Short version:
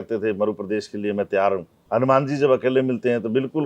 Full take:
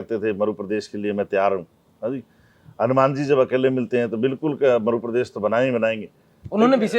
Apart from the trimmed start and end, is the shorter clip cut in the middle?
yes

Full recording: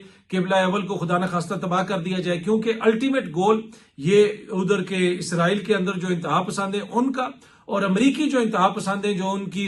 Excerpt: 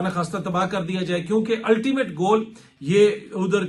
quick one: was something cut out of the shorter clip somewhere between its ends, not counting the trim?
no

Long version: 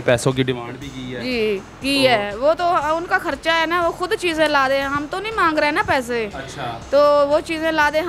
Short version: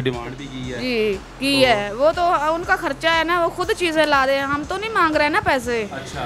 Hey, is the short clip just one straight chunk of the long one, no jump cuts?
yes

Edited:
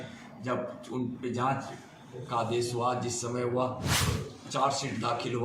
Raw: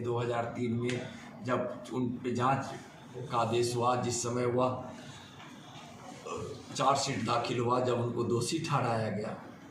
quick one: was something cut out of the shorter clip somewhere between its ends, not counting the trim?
yes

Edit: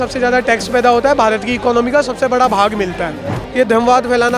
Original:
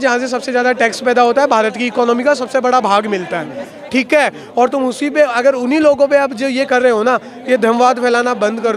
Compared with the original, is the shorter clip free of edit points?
no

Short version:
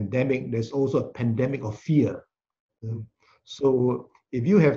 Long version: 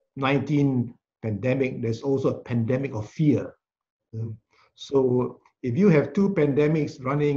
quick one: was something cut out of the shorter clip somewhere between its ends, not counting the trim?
no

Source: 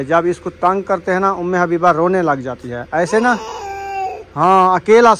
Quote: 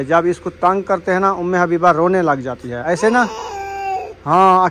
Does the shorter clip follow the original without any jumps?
no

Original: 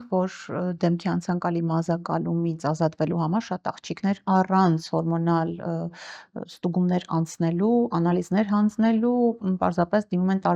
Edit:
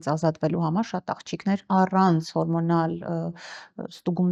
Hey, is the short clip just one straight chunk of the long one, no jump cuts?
yes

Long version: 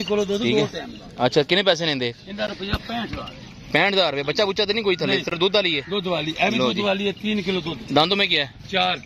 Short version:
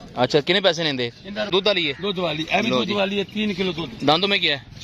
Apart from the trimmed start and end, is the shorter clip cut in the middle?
yes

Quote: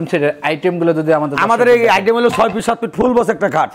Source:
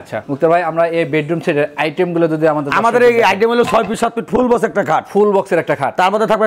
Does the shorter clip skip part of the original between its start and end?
no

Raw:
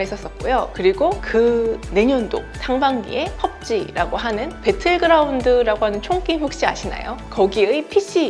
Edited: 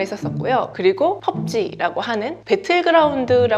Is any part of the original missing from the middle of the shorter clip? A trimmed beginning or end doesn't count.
yes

